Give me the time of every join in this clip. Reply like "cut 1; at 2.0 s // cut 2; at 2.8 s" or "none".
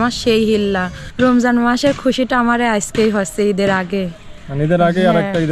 cut 1; at 1.0 s